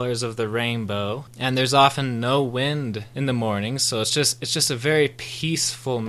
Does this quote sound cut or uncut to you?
cut